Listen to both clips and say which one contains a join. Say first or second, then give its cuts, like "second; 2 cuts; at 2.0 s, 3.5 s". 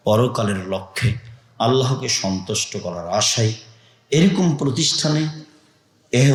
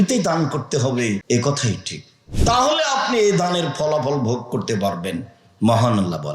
second; 1 cut; at 1.2 s